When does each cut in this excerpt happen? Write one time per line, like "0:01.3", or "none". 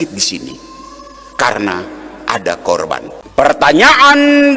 0:03.2

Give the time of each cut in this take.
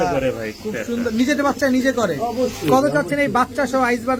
none

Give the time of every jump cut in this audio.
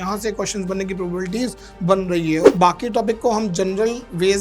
0:02.4

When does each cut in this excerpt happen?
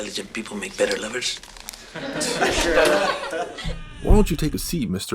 0:03.5

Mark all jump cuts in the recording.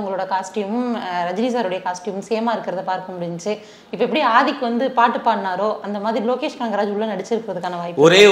none

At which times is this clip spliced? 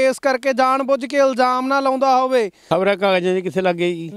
0:02.6

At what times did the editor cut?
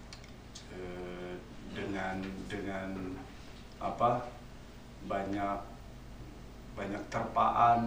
none

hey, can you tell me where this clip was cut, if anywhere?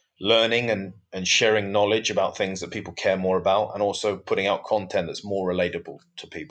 none

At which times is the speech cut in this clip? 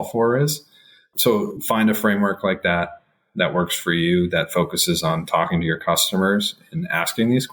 0:01.4

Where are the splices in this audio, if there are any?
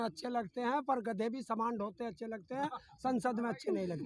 none

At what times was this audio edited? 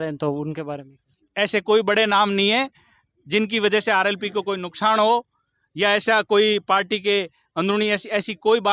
none

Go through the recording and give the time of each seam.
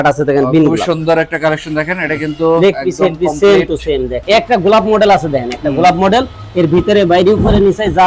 0:04.2

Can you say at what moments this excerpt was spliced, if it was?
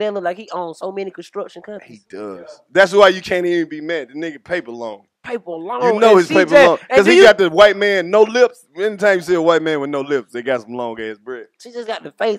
none

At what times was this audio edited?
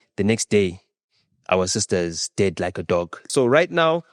0:03.2

